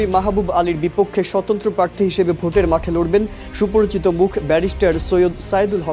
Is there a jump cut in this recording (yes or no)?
no